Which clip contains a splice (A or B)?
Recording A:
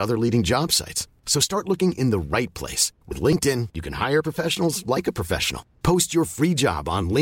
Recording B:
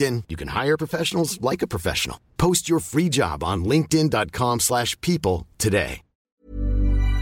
B